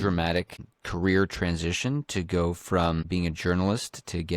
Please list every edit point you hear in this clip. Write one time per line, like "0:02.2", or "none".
0:03.1